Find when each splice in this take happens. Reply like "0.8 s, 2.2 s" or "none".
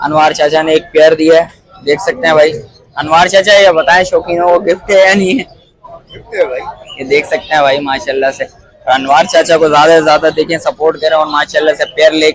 none